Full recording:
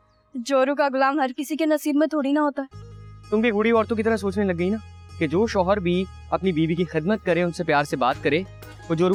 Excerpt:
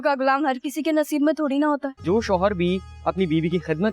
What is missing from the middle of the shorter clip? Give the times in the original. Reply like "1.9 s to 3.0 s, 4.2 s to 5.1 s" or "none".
2.8 s to 5.3 s